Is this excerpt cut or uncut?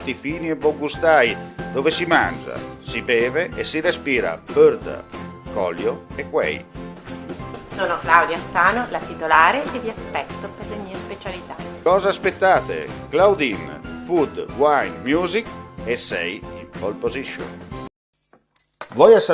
cut